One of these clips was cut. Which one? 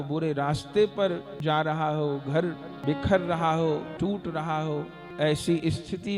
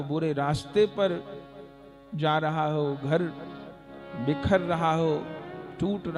first; 4 cuts; at 1.3 s, 2.7 s, 3.9 s, 5.0 s

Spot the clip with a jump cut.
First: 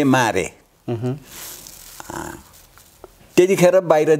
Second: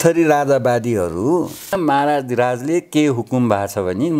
second; 1 cut; at 1.7 s

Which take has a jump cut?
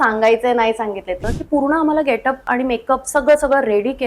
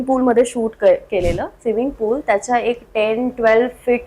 first; 2 cuts; at 1.3 s, 2.4 s

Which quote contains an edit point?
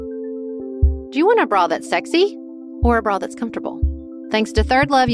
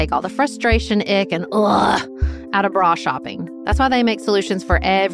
first; 1 cut; at 1.0 s

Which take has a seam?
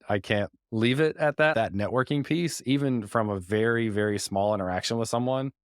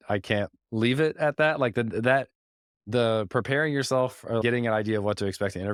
first; 1 cut; at 1.5 s

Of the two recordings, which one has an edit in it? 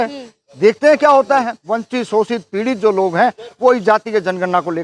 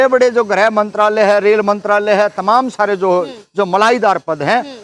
first; 1 cut; at 1.6 s

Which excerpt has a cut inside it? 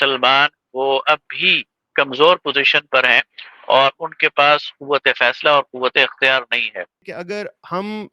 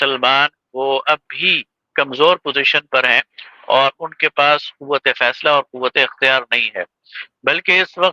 first; 1 cut; at 7.1 s

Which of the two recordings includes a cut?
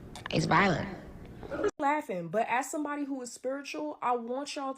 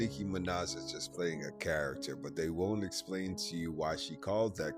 first; 1 cut; at 1.8 s

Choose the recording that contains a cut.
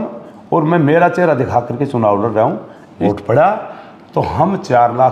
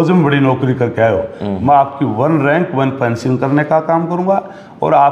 first; 1 cut; at 3.0 s

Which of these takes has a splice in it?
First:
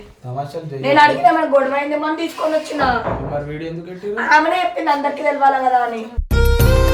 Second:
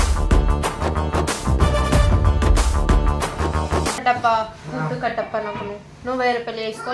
second; 1 cut; at 4.0 s

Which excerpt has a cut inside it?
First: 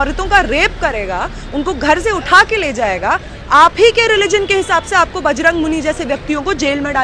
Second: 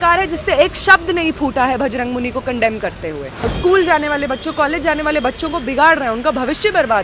second; 1 cut; at 3.5 s

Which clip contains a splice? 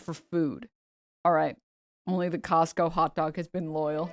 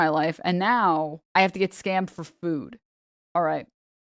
second; 1 cut; at 1.2 s

